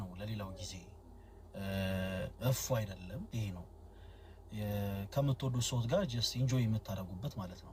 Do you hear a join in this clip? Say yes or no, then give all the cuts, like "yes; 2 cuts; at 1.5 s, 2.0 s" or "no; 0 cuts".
no; 0 cuts